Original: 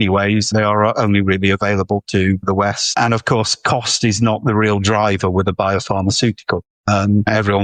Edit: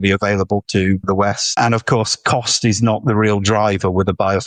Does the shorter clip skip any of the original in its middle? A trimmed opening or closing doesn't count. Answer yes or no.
no